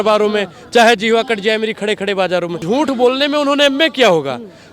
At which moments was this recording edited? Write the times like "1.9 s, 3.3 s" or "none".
2.6 s